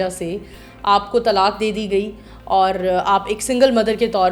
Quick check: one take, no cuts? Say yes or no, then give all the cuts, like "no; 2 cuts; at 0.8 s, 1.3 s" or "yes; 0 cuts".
yes; 0 cuts